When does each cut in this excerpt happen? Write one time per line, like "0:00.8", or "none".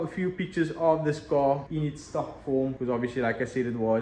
0:01.7
0:02.8